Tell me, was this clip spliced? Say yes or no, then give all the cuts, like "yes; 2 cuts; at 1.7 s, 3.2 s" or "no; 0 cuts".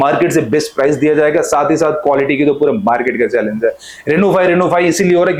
no; 0 cuts